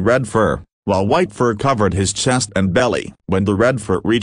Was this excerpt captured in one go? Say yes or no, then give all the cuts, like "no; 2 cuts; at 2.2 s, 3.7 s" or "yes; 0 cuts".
no; 1 cut; at 1.9 s